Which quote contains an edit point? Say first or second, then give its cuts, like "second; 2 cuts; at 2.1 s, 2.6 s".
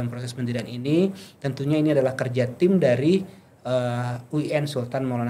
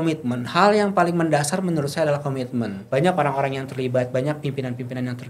second; 1 cut; at 2.8 s